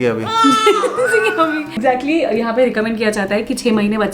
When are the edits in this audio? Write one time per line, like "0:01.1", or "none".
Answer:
0:01.7